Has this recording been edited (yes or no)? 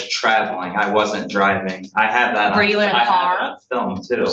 no